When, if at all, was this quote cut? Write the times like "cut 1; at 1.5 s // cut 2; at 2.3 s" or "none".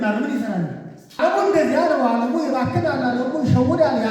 cut 1; at 1.0 s